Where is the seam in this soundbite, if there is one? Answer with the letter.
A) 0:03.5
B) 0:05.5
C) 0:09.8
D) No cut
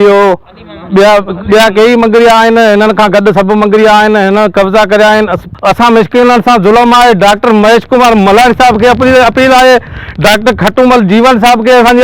B